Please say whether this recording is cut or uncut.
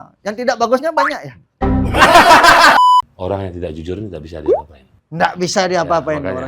cut